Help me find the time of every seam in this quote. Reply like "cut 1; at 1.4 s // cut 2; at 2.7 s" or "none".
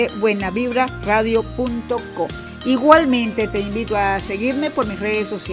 cut 1; at 2.5 s